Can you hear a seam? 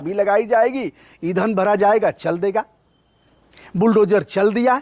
no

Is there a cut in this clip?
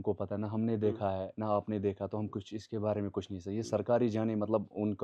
no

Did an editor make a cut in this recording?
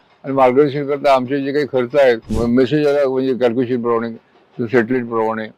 yes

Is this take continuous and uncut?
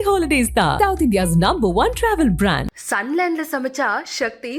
yes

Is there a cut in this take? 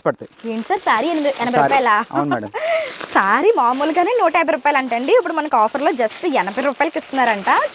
no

